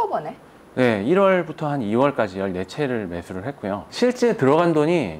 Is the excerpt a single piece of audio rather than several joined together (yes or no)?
no